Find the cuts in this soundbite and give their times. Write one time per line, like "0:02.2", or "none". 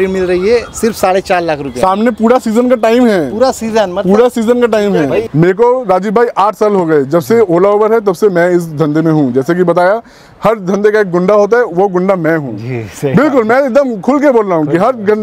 0:05.2